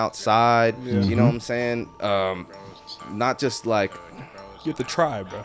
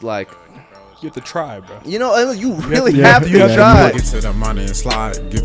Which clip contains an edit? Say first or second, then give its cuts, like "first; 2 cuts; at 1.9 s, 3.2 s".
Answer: second; 1 cut; at 3.9 s